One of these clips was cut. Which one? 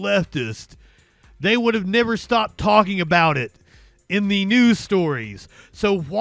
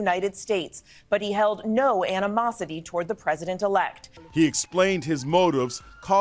second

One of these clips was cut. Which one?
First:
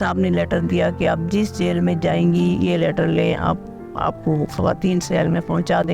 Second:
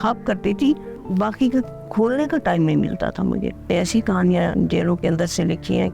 second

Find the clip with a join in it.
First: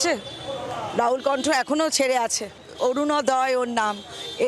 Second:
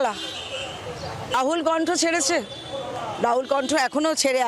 second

